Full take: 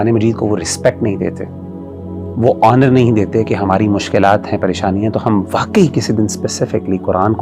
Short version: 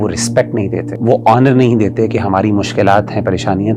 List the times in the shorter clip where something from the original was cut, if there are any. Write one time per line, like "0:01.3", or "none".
0:00.9